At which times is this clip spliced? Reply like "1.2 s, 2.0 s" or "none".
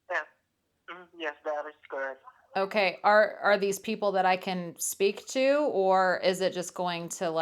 none